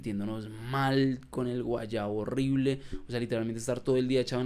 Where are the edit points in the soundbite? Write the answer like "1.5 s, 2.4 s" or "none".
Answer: none